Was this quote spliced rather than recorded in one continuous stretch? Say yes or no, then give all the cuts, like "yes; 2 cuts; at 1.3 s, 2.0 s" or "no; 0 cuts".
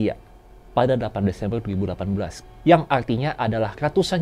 yes; 1 cut; at 2.4 s